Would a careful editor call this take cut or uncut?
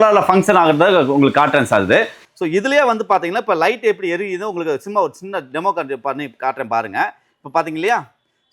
cut